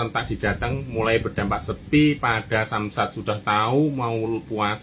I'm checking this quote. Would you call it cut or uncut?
uncut